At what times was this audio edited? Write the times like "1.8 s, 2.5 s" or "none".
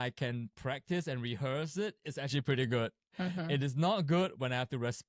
none